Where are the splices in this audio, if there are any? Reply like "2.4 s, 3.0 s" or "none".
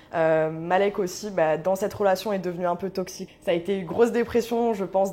3.2 s